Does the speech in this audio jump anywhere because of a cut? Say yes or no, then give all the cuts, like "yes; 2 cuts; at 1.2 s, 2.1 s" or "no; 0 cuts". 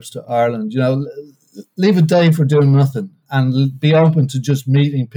yes; 1 cut; at 3.2 s